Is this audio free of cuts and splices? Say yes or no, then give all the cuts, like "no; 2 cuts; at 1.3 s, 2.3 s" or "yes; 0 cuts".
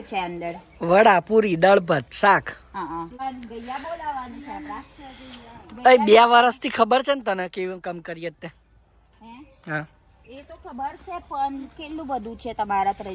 no; 1 cut; at 3.2 s